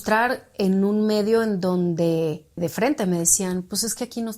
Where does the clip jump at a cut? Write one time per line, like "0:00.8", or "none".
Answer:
0:02.6